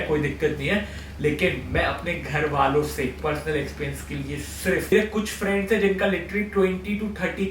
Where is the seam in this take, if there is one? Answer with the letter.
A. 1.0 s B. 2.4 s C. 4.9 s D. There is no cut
C